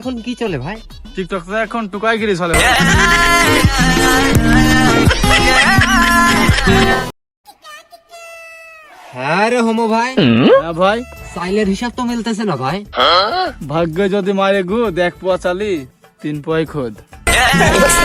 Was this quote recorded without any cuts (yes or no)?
yes